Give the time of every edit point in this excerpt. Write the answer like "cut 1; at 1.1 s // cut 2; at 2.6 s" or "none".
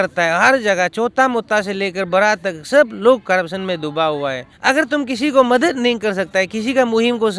cut 1; at 4.5 s